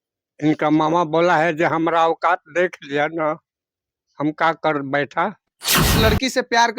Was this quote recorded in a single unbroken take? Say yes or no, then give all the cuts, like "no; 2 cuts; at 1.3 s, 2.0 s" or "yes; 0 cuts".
no; 1 cut; at 5.8 s